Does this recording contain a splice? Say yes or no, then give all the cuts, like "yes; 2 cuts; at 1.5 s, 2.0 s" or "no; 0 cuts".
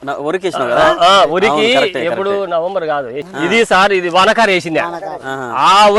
no; 0 cuts